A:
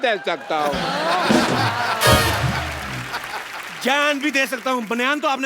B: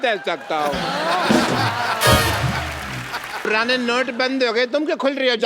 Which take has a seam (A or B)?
B